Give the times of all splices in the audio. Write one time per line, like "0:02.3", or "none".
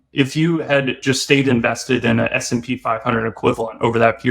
0:00.9